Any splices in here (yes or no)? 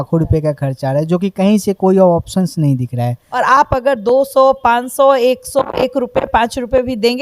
yes